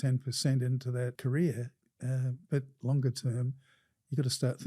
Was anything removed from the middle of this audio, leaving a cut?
yes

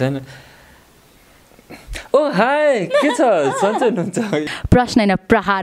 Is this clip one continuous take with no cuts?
no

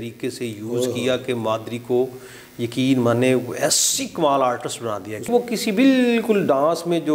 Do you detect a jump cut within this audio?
yes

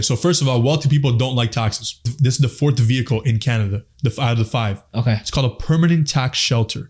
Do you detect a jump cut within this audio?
yes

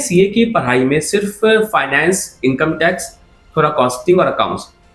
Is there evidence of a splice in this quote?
no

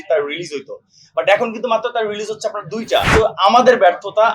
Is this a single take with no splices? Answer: no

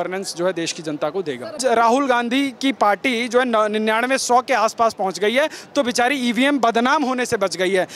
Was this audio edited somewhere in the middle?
yes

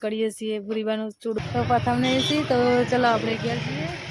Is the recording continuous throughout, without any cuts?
no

